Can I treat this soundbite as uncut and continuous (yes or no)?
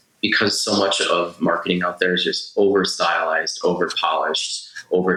yes